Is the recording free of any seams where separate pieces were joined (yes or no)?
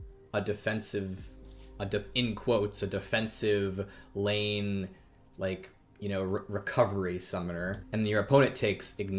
no